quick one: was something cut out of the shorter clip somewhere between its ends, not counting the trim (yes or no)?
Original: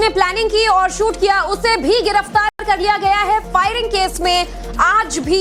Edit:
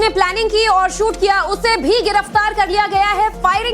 yes